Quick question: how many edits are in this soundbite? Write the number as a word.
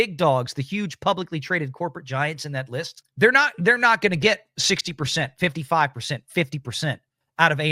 one